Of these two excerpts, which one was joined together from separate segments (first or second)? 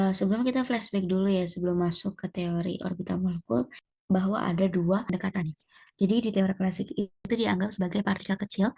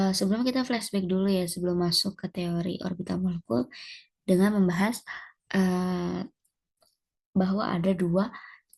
first